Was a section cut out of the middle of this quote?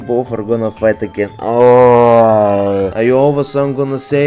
no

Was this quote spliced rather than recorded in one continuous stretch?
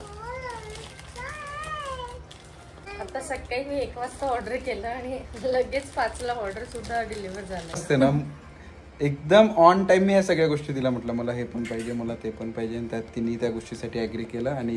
yes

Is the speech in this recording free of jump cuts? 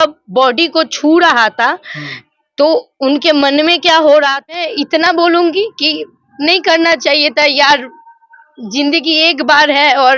no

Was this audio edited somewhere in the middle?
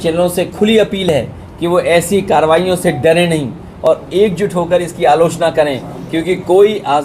no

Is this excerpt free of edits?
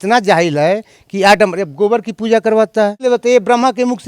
no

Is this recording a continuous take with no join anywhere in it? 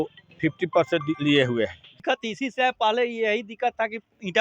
no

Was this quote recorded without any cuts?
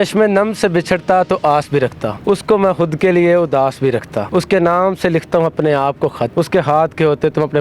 no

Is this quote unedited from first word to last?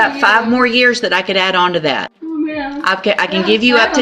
no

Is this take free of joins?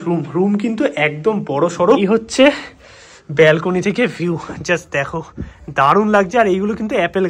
no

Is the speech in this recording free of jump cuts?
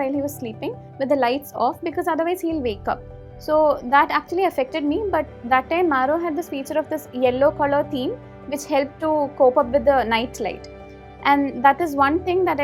yes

